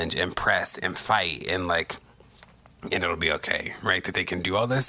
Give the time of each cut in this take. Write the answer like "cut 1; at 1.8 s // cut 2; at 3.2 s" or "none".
none